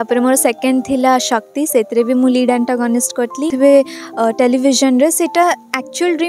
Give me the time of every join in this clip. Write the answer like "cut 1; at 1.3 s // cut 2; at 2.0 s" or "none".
cut 1; at 3.5 s